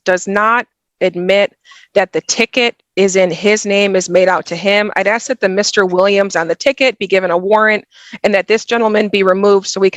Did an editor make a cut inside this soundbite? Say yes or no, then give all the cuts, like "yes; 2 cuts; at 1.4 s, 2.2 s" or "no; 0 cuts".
no; 0 cuts